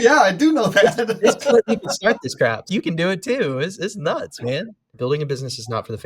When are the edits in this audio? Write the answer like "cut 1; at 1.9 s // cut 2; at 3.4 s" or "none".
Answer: cut 1; at 4.9 s